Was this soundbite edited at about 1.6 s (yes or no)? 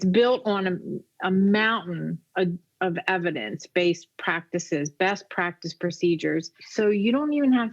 no